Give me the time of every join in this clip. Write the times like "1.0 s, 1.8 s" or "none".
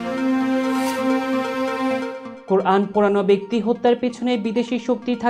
none